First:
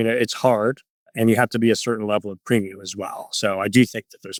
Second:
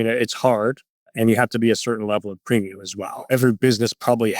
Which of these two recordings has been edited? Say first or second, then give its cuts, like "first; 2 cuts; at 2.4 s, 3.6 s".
second; 1 cut; at 3.3 s